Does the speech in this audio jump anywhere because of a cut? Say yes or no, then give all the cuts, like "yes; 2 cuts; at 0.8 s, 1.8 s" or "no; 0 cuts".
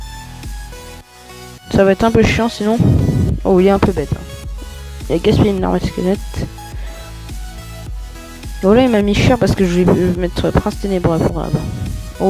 yes; 2 cuts; at 6.6 s, 8.5 s